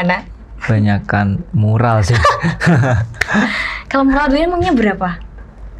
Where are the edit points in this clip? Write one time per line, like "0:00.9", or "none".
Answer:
none